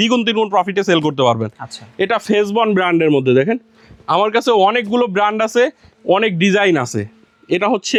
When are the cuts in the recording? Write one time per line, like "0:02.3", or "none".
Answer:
none